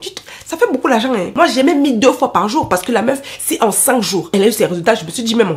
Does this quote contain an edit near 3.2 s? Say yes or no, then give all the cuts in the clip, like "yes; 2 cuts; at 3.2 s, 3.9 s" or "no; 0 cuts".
no; 1 cut; at 1.3 s